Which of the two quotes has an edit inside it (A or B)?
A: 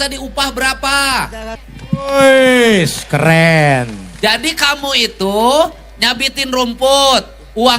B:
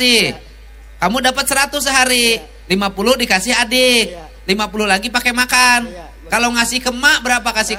A